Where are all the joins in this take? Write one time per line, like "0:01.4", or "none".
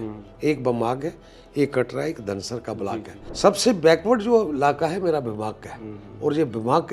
0:03.2